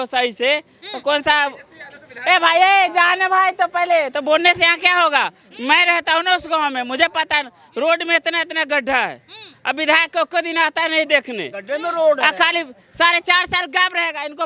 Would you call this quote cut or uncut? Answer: uncut